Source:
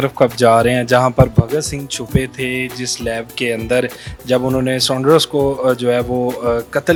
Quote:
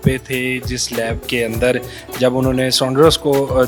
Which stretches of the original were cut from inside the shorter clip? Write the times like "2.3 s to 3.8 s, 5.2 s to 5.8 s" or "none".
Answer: none